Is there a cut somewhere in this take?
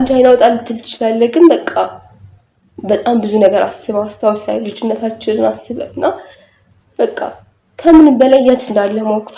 no; 0 cuts

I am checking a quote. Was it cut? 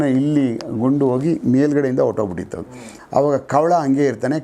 yes; 1 cut; at 2.8 s

